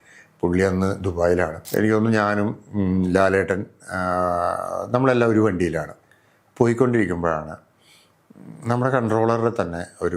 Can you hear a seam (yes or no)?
yes